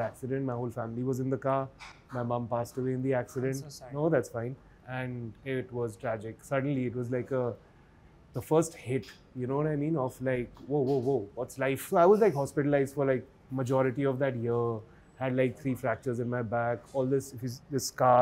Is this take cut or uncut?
uncut